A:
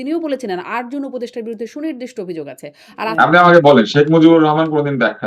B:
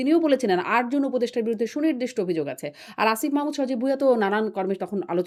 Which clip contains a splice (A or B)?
A